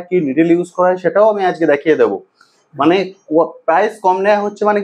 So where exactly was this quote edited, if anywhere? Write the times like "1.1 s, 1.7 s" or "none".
none